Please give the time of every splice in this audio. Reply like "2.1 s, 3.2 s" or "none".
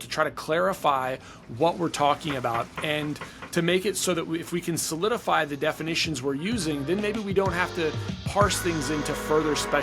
none